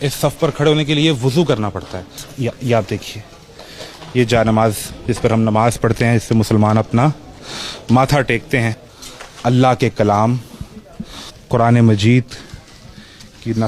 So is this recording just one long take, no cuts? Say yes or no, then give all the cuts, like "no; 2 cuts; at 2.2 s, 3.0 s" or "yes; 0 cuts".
no; 2 cuts; at 2.2 s, 8.8 s